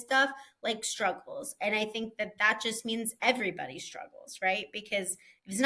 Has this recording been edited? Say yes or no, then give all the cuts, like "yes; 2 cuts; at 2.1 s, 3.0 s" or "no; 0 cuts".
no; 0 cuts